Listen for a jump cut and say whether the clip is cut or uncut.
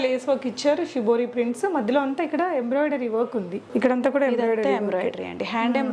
uncut